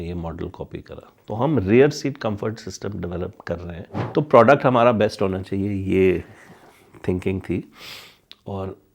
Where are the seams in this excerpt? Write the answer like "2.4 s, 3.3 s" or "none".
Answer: 1.1 s, 3.9 s